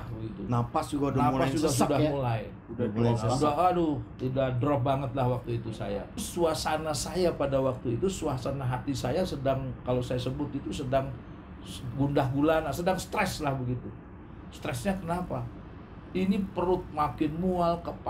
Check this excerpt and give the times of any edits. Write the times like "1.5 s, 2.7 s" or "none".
6.3 s